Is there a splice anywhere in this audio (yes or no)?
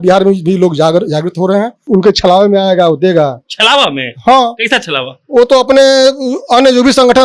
yes